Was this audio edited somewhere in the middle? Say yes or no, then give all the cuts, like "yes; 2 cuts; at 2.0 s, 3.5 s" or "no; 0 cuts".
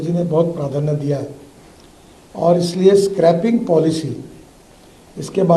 no; 0 cuts